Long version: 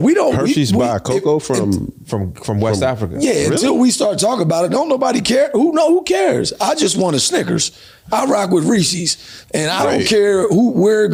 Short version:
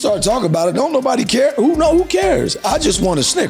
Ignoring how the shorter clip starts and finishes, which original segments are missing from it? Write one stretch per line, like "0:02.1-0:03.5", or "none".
none